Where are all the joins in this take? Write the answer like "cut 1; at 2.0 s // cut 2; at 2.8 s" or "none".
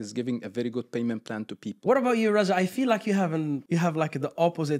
cut 1; at 1.7 s // cut 2; at 3.6 s